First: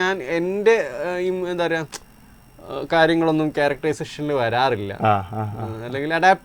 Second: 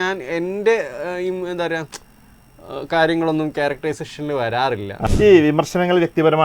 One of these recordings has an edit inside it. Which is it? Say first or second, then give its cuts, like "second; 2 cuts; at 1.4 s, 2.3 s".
second; 1 cut; at 5.1 s